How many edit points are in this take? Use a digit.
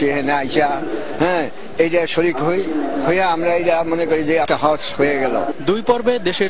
0